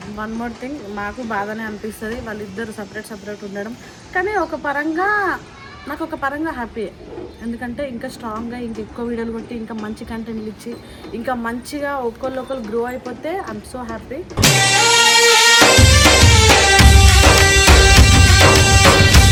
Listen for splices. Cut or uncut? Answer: uncut